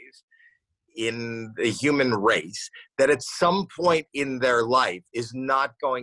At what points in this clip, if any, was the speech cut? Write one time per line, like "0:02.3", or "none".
none